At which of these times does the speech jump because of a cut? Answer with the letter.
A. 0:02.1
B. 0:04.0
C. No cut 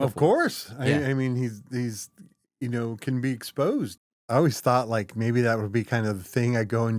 B